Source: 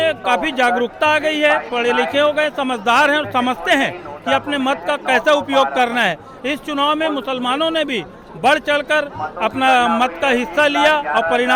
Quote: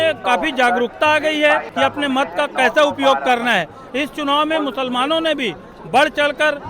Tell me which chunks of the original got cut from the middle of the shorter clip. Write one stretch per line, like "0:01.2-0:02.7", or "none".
0:01.7-0:04.2